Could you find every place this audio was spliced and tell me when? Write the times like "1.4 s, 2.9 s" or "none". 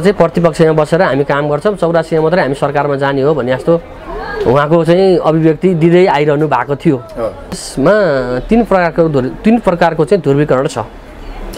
7.6 s